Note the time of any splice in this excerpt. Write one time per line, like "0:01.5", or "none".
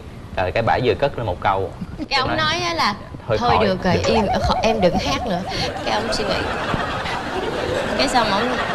none